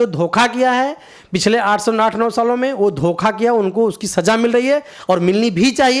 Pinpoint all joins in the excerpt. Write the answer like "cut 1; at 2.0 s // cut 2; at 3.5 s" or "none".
none